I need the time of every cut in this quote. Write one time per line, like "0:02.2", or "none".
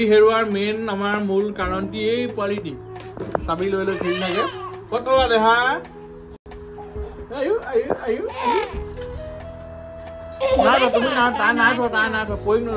none